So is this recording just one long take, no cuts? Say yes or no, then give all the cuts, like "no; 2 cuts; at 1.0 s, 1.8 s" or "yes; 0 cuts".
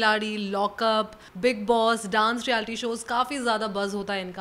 yes; 0 cuts